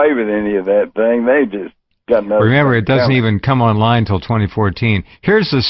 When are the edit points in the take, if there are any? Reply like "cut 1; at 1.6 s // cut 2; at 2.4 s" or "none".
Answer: none